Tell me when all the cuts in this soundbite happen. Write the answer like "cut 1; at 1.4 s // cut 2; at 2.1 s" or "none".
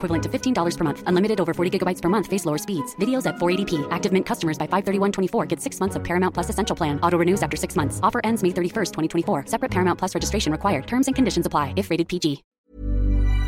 cut 1; at 12.5 s

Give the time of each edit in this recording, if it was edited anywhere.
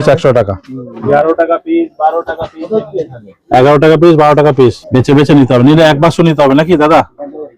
cut 1; at 1.0 s // cut 2; at 4.8 s

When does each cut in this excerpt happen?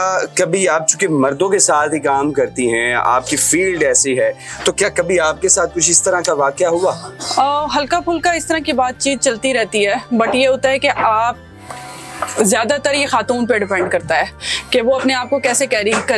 none

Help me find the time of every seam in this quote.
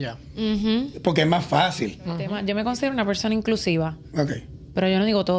cut 1; at 2.4 s

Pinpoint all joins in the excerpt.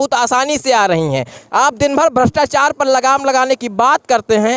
cut 1; at 1.4 s

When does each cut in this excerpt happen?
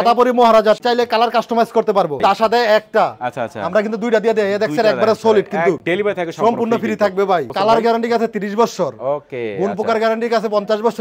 cut 1; at 0.8 s // cut 2; at 2.2 s // cut 3; at 5.8 s // cut 4; at 7.5 s

